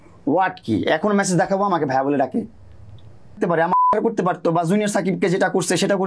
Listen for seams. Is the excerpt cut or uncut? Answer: cut